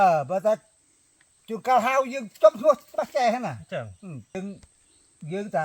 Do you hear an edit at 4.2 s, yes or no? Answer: yes